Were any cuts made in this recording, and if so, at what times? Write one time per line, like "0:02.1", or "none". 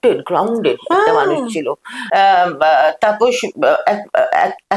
0:02.0